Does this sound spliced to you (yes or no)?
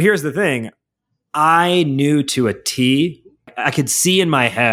yes